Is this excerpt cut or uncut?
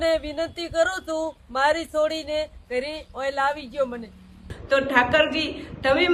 cut